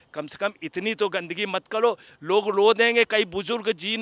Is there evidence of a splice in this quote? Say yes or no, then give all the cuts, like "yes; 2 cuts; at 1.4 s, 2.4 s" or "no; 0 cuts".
no; 0 cuts